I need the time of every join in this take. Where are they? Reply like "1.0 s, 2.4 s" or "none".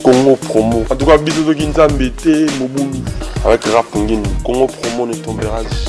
none